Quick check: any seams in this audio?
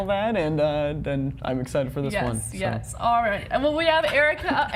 no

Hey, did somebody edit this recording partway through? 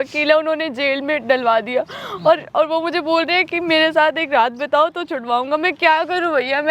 no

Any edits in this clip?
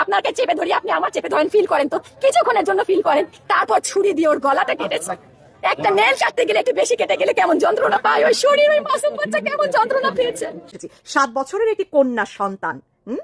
yes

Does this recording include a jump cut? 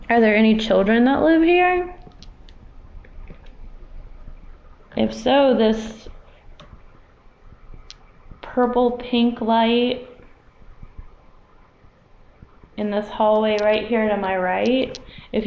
no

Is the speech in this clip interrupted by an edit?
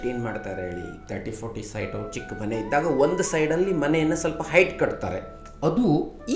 no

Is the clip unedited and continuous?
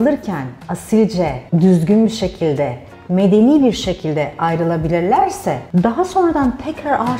yes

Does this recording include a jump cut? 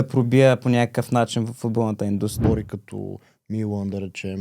yes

